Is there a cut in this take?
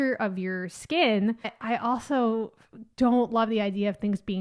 yes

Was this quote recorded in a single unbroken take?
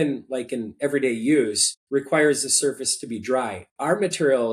yes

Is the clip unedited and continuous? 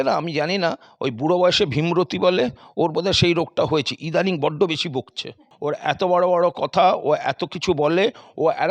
no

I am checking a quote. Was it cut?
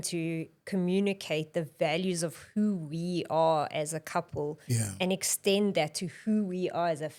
no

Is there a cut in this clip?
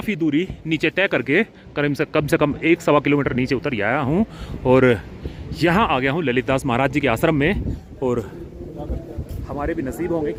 no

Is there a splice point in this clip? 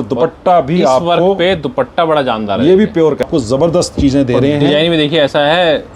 yes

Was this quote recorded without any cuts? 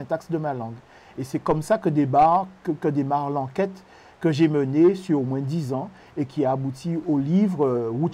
yes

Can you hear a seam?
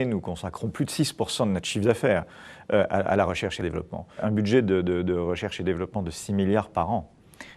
yes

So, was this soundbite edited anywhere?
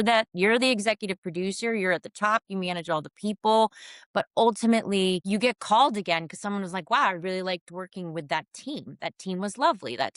yes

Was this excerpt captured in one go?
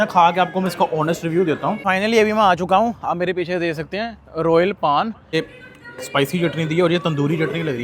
no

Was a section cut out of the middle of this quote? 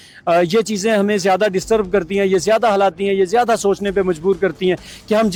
no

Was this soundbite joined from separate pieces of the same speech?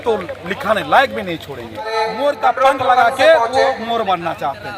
yes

